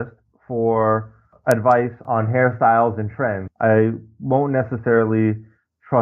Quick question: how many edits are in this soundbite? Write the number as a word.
three